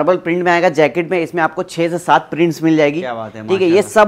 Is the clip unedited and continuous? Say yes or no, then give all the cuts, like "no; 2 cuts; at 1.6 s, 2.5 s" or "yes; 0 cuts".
yes; 0 cuts